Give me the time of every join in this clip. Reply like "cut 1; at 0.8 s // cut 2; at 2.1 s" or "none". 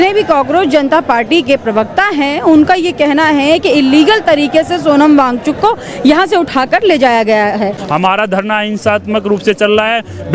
cut 1; at 7.8 s